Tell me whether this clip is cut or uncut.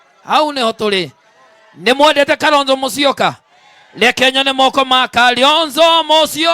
cut